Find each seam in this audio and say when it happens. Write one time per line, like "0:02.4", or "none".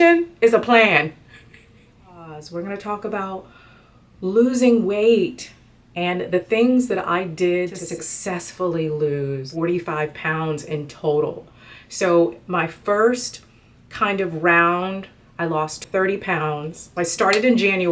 0:02.4
0:07.8
0:09.5
0:15.8
0:16.8